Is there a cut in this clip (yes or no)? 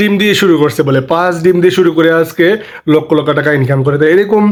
no